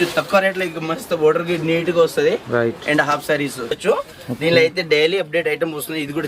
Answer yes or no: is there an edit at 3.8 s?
yes